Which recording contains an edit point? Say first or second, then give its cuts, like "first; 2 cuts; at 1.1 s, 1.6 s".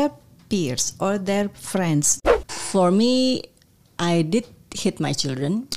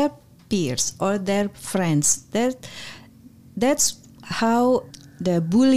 first; 1 cut; at 2.2 s